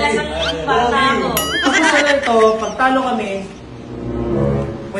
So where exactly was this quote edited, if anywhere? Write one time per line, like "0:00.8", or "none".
0:01.7